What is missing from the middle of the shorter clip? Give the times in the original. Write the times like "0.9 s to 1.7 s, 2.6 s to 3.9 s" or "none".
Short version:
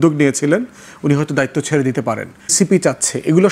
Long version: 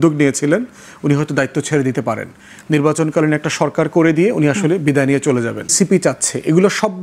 2.4 s to 5.6 s